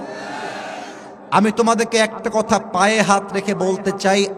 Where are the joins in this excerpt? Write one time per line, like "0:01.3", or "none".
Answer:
none